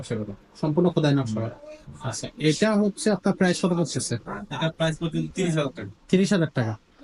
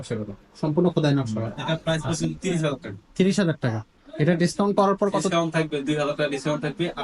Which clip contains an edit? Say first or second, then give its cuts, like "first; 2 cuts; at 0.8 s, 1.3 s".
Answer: second; 1 cut; at 1.5 s